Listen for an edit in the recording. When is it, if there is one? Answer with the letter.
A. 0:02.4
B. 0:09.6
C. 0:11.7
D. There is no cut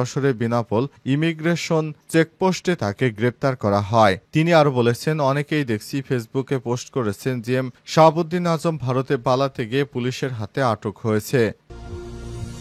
C